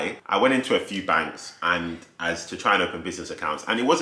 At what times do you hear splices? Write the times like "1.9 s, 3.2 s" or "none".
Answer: none